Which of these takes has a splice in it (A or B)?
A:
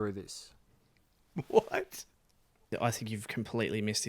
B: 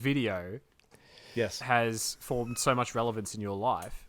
A